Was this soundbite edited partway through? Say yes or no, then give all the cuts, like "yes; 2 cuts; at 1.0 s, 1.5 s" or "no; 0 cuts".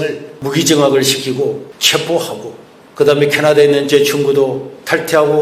no; 0 cuts